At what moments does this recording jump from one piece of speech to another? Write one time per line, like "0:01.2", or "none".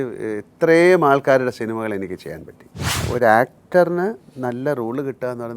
0:03.0